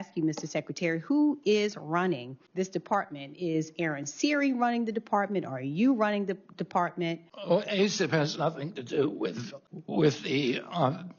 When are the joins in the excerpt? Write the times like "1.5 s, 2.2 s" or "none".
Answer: 2.4 s, 7.3 s, 9.5 s